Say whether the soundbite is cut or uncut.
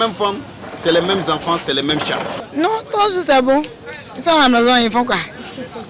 cut